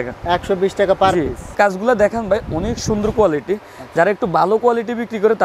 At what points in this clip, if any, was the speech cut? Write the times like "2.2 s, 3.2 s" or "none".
1.6 s